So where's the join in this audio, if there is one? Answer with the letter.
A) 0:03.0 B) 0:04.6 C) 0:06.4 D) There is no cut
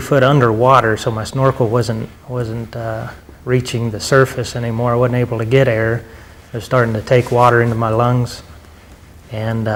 D